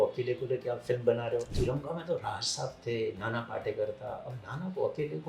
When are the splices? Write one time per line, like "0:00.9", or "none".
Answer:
0:01.5